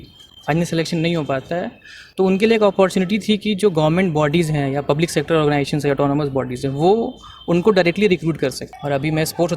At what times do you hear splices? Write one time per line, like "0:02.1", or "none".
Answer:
0:08.7